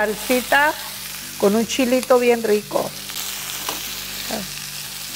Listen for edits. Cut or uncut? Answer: uncut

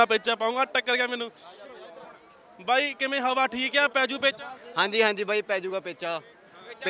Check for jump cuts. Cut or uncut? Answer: uncut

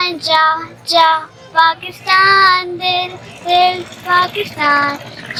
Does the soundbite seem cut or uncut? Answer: uncut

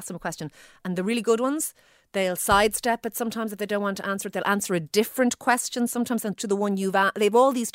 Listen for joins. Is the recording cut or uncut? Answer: uncut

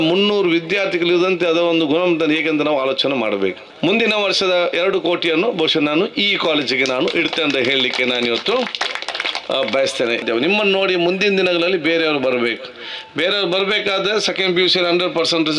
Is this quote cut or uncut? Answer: cut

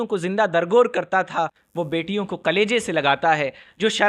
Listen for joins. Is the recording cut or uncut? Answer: uncut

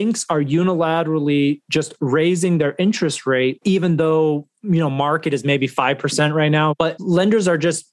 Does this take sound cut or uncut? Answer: cut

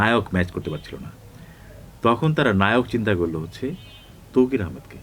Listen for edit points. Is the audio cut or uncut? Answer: uncut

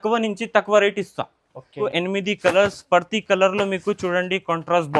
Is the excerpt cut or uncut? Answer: cut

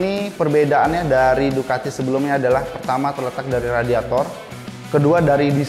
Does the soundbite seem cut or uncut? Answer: uncut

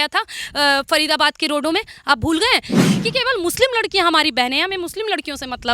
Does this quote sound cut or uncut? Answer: cut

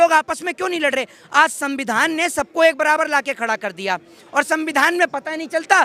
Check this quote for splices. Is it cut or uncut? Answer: uncut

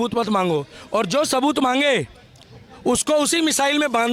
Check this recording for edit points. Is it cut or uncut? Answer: uncut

